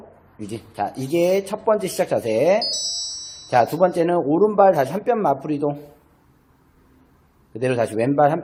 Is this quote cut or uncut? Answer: uncut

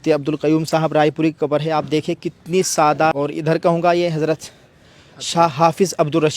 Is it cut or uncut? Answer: cut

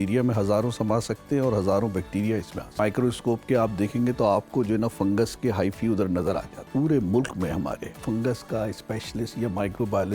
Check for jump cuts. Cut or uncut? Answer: cut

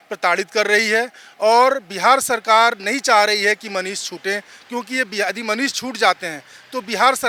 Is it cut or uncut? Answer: uncut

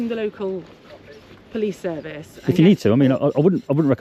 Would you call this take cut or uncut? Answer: uncut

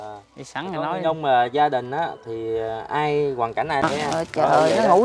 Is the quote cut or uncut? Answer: cut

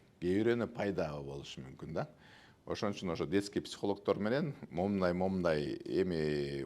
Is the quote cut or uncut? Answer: uncut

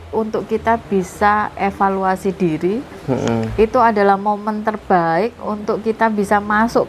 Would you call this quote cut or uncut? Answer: uncut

